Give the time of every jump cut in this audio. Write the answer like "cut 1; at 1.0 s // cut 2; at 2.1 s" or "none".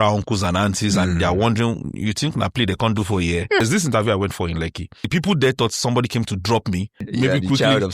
cut 1; at 3.6 s // cut 2; at 5.1 s // cut 3; at 7.0 s